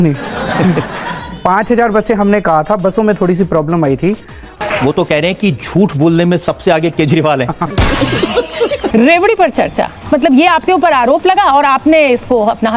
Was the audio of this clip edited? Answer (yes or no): yes